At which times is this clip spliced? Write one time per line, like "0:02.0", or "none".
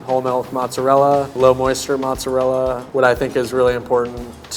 0:01.4
0:02.8